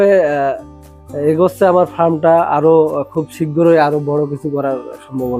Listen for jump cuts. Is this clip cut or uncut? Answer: uncut